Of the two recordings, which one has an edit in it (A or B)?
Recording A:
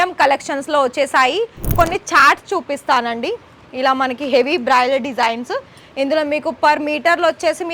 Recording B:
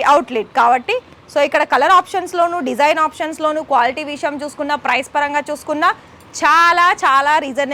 A